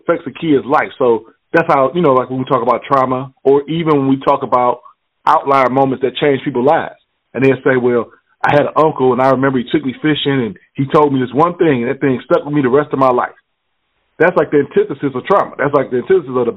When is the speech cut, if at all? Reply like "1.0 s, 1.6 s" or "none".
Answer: 5.1 s